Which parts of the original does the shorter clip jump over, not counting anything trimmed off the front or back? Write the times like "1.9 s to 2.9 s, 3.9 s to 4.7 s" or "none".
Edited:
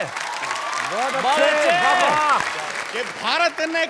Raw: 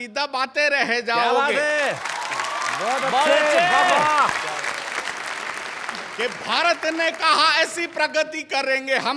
4.7 s to 6.0 s